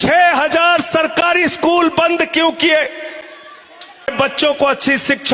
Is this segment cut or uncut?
cut